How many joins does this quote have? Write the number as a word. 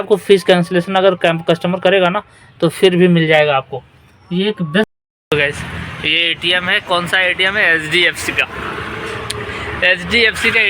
one